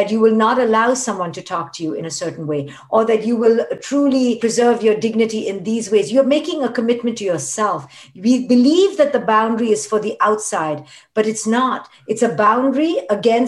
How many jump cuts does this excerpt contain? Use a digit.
1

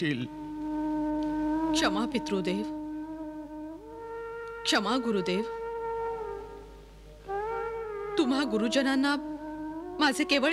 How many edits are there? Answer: 0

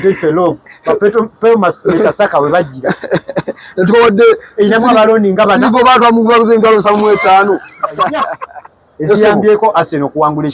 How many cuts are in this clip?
1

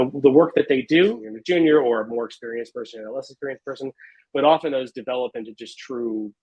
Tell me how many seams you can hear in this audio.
1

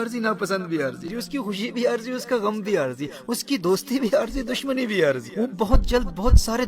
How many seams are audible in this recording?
2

